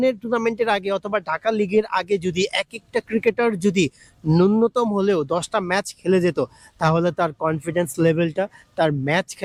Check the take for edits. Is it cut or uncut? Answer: uncut